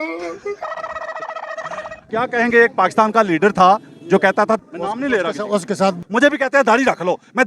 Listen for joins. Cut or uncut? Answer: cut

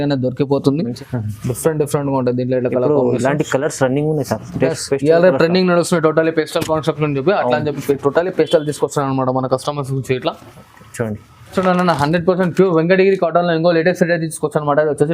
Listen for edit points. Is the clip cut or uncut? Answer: cut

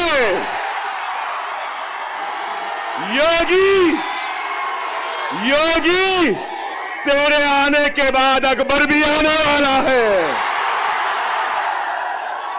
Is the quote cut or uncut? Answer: cut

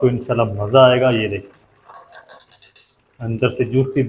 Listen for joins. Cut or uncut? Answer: uncut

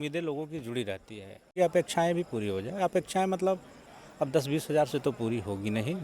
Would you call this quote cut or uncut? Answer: cut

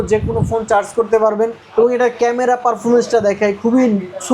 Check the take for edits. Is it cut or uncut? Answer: cut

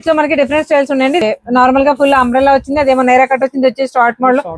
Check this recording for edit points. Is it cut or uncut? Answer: cut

